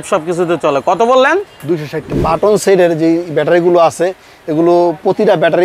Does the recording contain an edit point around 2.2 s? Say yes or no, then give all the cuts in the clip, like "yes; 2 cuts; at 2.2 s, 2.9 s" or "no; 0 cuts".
yes; 1 cut; at 2.2 s